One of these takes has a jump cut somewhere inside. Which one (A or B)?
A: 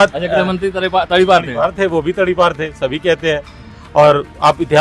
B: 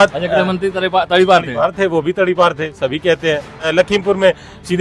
B